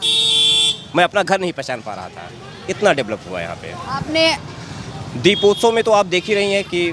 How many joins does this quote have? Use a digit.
1